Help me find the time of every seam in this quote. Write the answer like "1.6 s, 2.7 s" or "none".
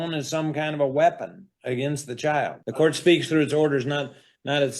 2.6 s